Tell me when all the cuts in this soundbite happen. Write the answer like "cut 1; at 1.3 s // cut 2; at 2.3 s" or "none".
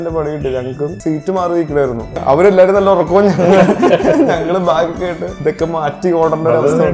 cut 1; at 1.0 s // cut 2; at 2.1 s // cut 3; at 5.3 s

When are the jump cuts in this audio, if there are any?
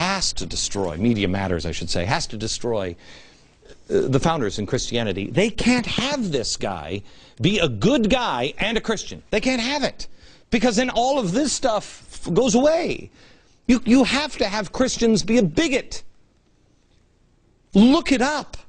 none

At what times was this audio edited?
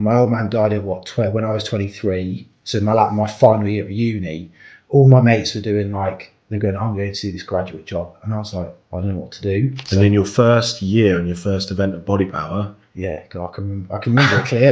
cut 1; at 8.8 s // cut 2; at 9.8 s

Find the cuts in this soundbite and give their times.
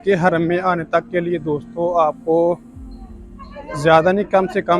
none

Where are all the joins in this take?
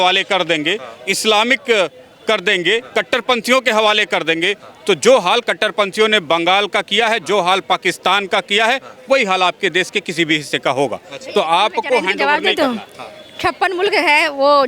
none

